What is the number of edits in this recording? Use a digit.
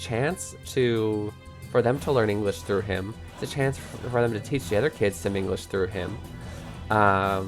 0